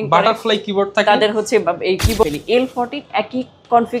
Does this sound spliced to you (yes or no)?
yes